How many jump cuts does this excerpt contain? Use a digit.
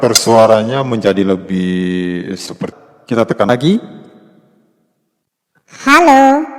1